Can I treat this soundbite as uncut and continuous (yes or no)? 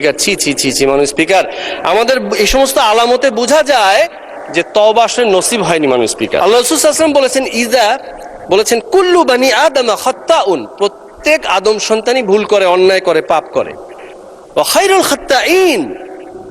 no